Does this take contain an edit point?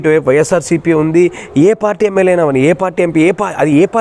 no; 0 cuts

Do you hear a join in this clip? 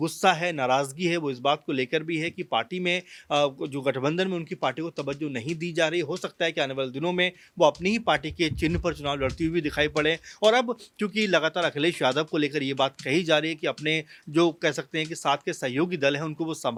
no; 0 cuts

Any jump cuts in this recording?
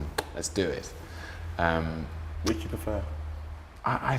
no; 0 cuts

